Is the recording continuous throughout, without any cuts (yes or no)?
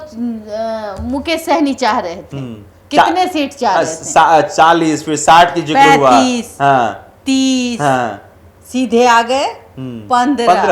yes